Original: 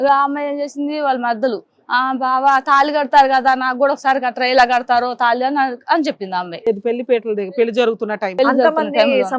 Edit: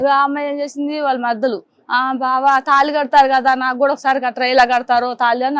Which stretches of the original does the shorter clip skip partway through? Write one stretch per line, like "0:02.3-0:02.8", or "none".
none